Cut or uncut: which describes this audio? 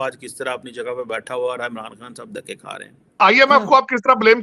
cut